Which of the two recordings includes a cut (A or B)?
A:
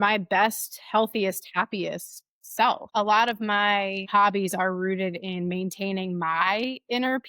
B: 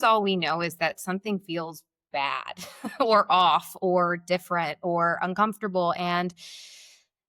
A